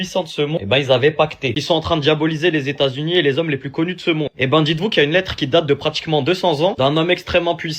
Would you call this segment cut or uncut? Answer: cut